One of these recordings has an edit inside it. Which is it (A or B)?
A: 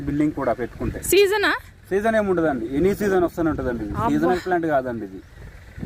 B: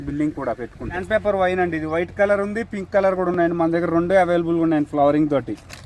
B